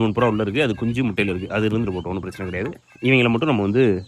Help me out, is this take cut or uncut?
uncut